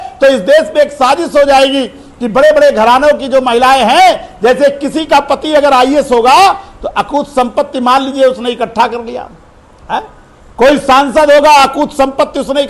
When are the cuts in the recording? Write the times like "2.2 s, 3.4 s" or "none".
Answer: none